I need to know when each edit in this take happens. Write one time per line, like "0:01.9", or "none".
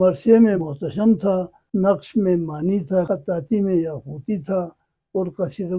0:01.1
0:03.1